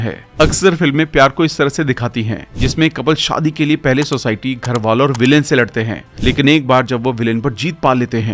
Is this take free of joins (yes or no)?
yes